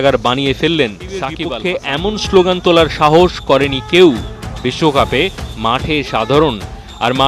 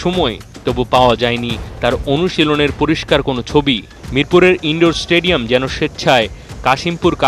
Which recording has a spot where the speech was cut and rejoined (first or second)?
first